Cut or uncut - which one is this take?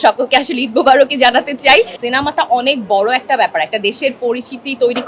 cut